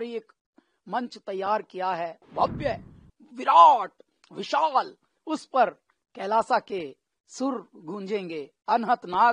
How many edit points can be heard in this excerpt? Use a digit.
1